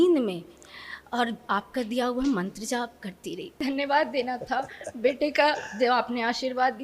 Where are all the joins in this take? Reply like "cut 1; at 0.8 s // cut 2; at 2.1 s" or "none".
cut 1; at 3.6 s